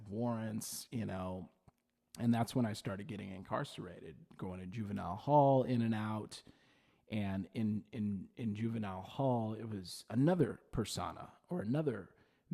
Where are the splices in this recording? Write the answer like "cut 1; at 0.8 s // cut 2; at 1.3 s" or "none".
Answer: none